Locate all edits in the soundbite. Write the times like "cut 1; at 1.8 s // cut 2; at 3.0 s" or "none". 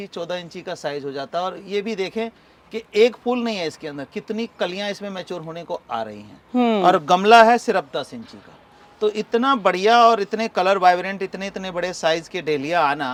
none